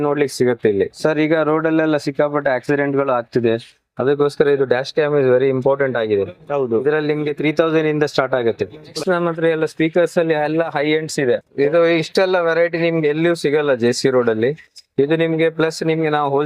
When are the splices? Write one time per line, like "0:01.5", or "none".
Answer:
0:00.9
0:08.9
0:11.5